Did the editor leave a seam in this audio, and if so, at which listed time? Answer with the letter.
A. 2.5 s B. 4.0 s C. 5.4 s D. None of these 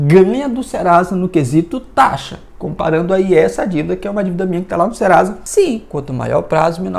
C